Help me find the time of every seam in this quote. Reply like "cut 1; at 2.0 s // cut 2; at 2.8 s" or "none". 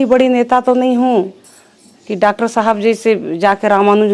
none